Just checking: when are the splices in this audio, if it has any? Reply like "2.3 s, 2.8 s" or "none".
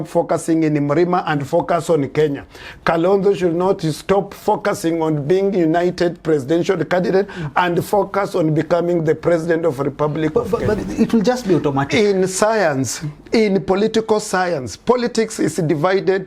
10.8 s